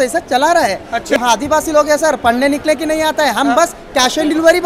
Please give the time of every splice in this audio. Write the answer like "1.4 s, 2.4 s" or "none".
1.2 s